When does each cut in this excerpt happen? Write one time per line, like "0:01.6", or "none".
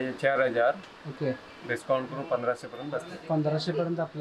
none